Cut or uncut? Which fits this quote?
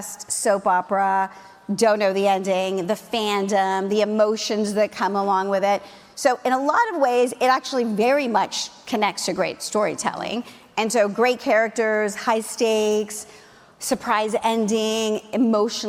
uncut